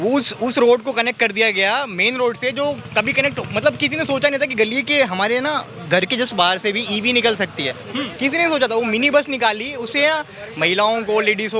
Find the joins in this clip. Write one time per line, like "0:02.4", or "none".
none